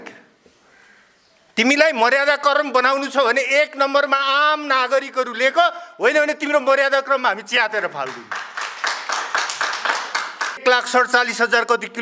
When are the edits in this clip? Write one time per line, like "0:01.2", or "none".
0:10.6